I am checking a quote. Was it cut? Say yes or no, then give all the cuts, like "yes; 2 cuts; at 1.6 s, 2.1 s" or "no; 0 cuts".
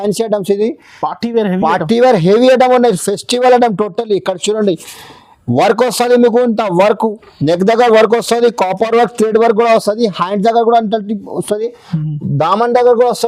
no; 0 cuts